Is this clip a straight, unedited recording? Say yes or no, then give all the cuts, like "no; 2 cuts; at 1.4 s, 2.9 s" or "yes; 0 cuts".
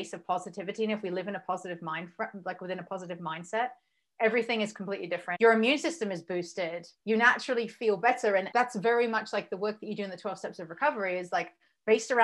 no; 3 cuts; at 5.3 s, 6.9 s, 8.5 s